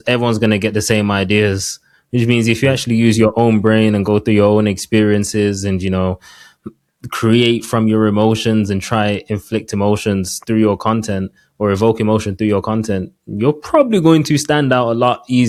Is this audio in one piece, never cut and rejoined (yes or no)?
yes